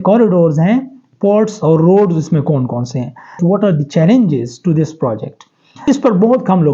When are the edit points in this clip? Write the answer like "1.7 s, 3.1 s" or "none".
3.4 s, 5.8 s